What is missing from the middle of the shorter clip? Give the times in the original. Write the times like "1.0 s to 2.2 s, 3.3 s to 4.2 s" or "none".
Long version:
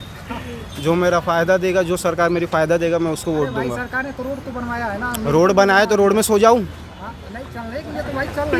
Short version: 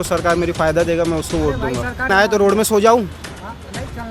4.0 s to 5.7 s